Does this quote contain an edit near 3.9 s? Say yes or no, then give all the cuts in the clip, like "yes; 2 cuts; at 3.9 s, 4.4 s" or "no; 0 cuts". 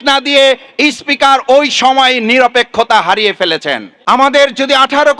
yes; 1 cut; at 3.9 s